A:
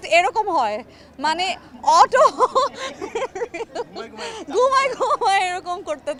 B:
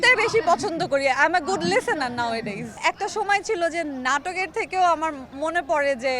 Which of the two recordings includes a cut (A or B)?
B